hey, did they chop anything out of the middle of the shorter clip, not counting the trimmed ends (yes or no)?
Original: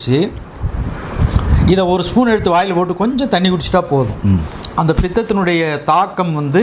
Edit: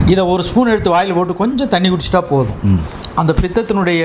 no